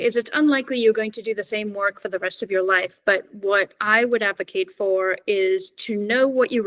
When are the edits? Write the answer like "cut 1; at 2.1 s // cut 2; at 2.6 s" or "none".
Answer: none

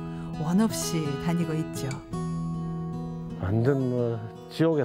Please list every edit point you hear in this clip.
none

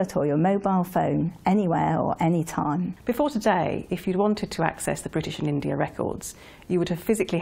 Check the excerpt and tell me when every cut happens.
cut 1; at 1.2 s

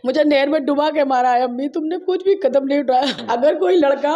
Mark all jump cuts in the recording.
cut 1; at 3.1 s

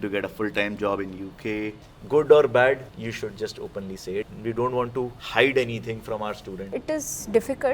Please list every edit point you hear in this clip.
cut 1; at 1.9 s // cut 2; at 2.9 s // cut 3; at 4.3 s // cut 4; at 5.2 s // cut 5; at 6.7 s

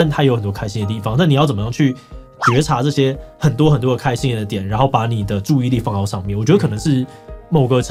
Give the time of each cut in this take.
none

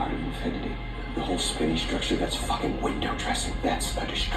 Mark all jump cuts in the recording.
none

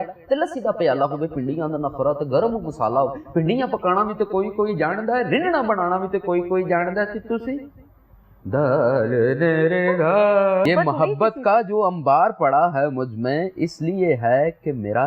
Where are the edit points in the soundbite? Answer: cut 1; at 10.7 s

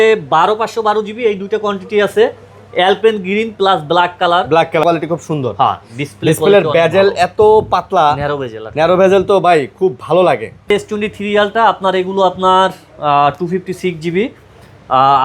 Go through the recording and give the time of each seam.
cut 1; at 4.8 s // cut 2; at 10.7 s

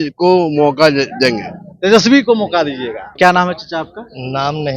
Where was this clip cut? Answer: cut 1; at 3.0 s

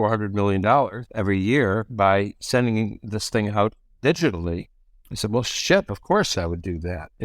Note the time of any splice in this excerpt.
cut 1; at 6.3 s

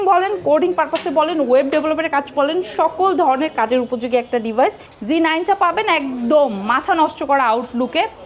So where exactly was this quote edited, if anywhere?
cut 1; at 4.9 s

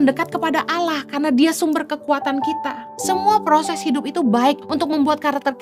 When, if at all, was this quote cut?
cut 1; at 2.9 s // cut 2; at 4.6 s

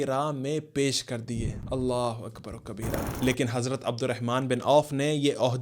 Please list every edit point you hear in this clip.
cut 1; at 3.1 s

